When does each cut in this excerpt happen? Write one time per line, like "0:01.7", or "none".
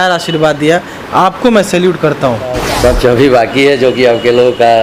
0:02.6